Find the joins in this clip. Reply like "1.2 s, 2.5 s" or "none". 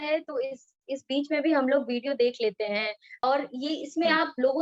3.0 s